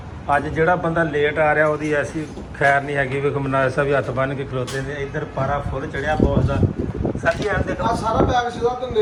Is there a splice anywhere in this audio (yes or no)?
no